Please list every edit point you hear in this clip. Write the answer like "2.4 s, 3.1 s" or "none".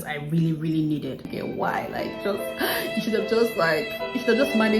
1.3 s